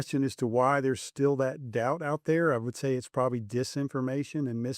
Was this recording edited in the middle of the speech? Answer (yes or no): no